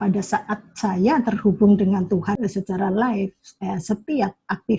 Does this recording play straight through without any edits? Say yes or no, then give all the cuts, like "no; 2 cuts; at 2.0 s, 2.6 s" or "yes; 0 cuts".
no; 1 cut; at 2.3 s